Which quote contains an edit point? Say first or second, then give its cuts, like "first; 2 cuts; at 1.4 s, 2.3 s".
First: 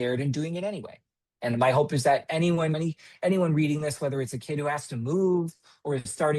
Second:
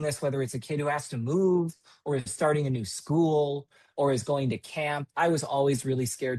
first; 1 cut; at 2.7 s